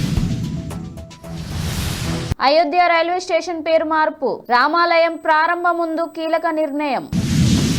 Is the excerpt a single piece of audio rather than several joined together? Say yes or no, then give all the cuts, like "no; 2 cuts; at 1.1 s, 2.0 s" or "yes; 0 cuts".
no; 2 cuts; at 2.3 s, 6.9 s